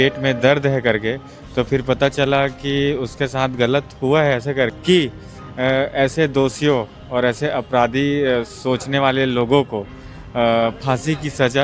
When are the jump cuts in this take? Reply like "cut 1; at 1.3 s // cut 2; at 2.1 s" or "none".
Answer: cut 1; at 4.7 s